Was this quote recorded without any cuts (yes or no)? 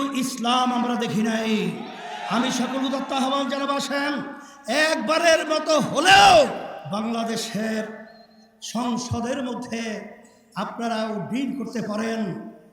no